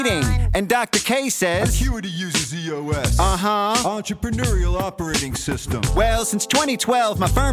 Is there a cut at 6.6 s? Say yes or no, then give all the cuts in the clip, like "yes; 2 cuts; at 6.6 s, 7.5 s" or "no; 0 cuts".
no; 0 cuts